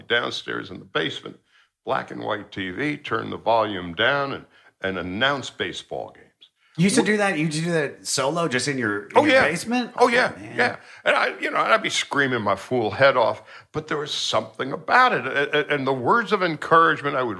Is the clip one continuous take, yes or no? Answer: yes